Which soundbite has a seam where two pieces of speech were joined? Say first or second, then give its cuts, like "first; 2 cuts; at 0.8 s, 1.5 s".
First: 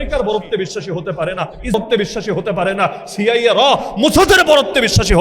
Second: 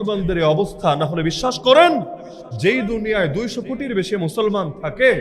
first; 1 cut; at 1.7 s